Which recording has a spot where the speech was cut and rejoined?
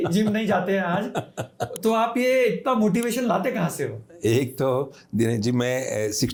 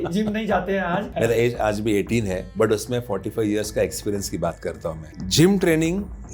second; 3 cuts; at 1.1 s, 2.5 s, 5.0 s

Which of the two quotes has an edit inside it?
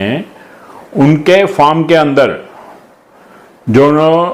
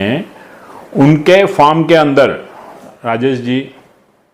second; 1 cut; at 2.9 s

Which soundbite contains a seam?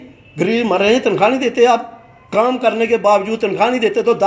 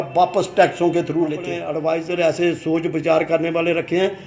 second; 1 cut; at 1.7 s

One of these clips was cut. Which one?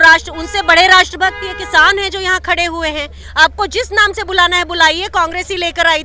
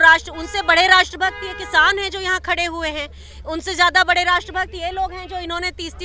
first; 1 cut; at 3.2 s

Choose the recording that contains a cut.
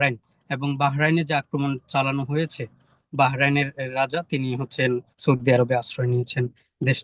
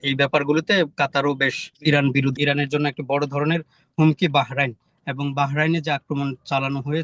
second; 2 cuts; at 1.6 s, 2.3 s

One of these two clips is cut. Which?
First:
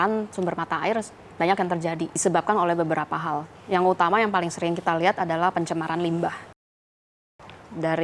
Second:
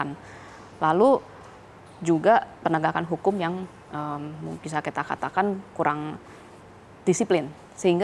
first; 1 cut; at 2.1 s

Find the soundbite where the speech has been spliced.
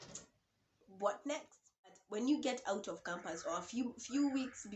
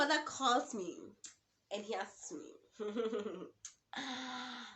first; 1 cut; at 2.0 s

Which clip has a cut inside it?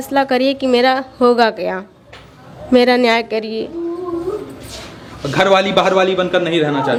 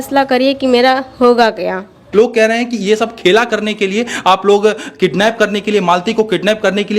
second; 1 cut; at 2.0 s

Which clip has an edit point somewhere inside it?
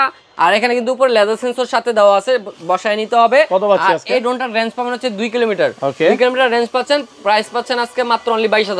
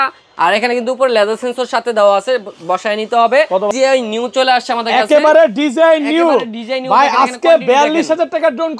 second; 1 cut; at 3.7 s

